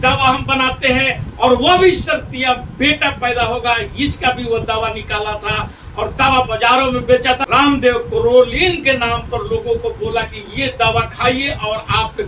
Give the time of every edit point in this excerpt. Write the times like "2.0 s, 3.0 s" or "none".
7.4 s